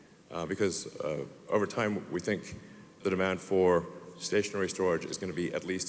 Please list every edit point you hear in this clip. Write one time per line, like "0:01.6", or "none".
none

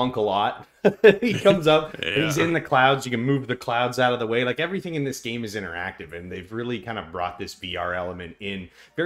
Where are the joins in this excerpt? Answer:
none

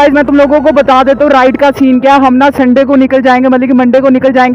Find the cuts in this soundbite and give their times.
none

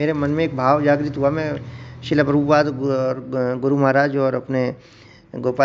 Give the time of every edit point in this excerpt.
none

